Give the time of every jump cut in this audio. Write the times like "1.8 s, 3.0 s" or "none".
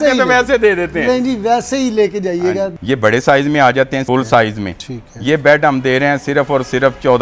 2.7 s, 4.0 s